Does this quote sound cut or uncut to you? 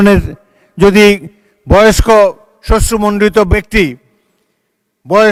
uncut